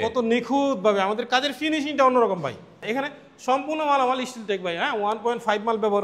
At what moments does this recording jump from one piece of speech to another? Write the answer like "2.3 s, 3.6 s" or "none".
2.8 s